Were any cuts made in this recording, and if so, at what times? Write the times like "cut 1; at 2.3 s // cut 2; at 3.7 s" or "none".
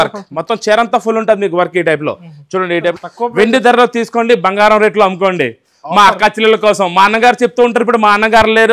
cut 1; at 2.9 s